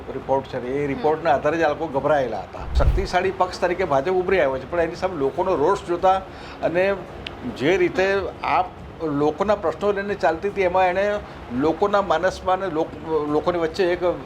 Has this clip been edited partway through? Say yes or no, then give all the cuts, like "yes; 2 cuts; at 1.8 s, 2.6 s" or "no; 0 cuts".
yes; 1 cut; at 2.7 s